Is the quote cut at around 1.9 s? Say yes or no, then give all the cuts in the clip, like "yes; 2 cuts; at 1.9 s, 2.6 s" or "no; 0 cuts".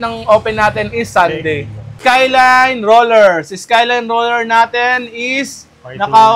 yes; 1 cut; at 1.9 s